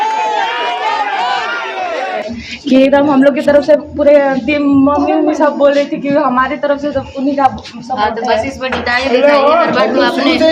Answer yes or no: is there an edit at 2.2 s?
yes